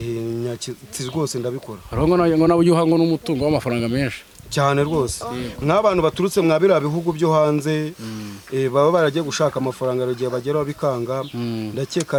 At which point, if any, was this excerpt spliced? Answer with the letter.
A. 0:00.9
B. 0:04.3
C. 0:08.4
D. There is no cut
D